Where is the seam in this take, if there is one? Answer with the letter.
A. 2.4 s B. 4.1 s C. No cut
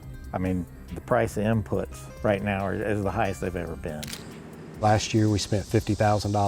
B